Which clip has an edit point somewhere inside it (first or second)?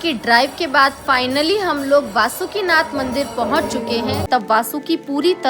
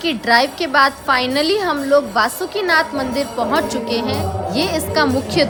first